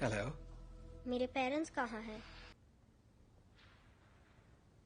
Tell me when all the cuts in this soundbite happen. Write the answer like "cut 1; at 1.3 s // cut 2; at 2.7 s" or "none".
cut 1; at 2.6 s

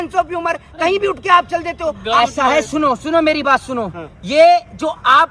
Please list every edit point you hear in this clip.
cut 1; at 2.2 s

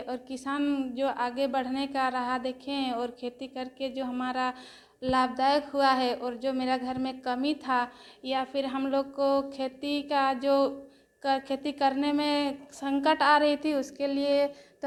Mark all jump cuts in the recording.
none

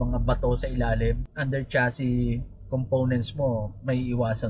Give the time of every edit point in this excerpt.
cut 1; at 1.3 s

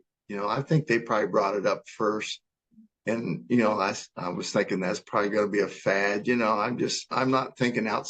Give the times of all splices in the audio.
cut 1; at 7.1 s

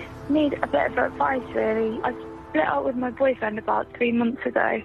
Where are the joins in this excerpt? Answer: cut 1; at 2.0 s

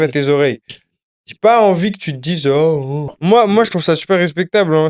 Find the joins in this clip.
cut 1; at 3.2 s

